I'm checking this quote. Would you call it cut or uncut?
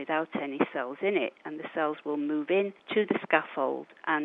cut